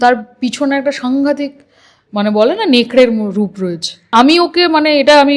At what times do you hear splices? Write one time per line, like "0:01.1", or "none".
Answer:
0:04.1